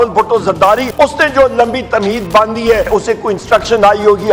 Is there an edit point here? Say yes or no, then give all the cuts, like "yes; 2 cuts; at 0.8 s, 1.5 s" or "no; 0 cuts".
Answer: yes; 2 cuts; at 0.9 s, 2.9 s